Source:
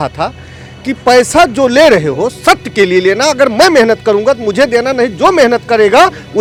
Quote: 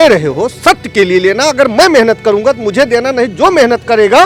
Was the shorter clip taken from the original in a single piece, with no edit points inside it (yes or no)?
yes